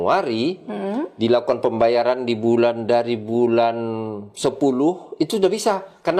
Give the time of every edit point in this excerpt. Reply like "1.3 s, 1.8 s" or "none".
none